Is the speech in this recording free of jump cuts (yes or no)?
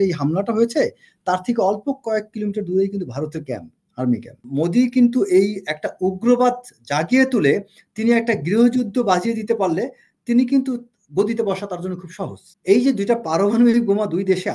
no